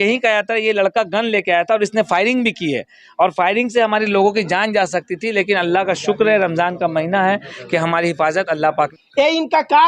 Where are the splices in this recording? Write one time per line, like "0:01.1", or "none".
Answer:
0:08.9